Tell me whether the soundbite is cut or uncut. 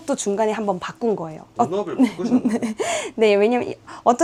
uncut